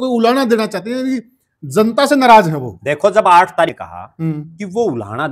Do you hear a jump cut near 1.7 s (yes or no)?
no